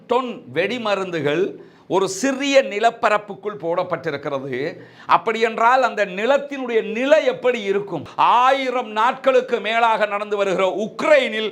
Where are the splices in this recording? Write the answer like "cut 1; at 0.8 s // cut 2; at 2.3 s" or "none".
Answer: cut 1; at 8.0 s